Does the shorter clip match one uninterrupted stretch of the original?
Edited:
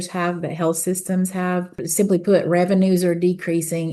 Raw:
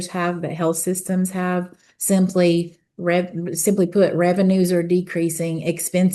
no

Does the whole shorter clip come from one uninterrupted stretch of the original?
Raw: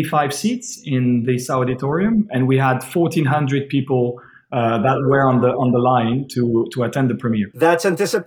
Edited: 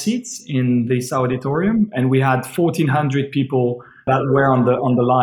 no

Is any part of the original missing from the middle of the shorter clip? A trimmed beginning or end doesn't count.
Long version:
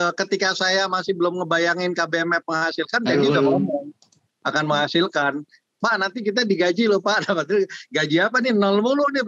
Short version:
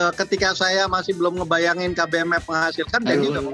no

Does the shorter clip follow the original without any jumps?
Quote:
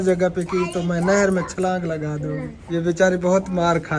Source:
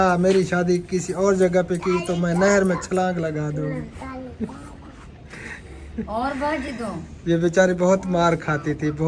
no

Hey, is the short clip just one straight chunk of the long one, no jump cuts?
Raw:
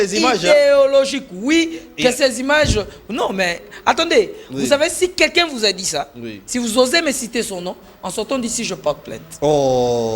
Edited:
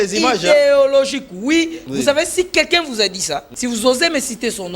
no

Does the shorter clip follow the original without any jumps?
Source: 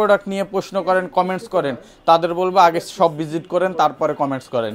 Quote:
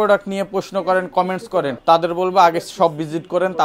no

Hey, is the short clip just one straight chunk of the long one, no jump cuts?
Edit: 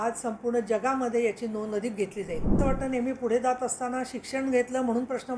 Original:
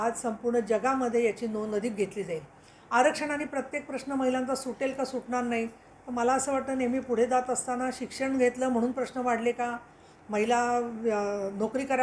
no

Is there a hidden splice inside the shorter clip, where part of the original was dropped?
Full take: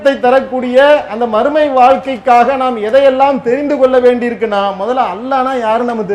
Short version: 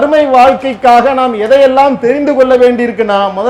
no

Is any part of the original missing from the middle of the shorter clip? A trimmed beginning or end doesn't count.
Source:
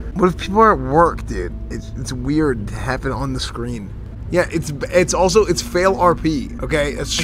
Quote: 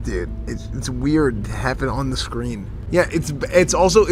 yes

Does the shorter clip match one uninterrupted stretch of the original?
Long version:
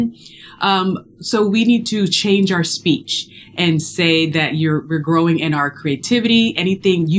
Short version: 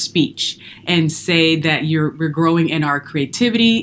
yes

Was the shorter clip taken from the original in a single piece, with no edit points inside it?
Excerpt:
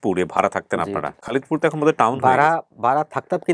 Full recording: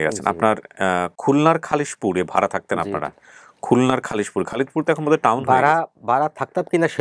no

